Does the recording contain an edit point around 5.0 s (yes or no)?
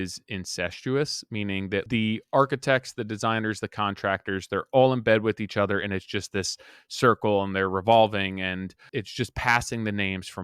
no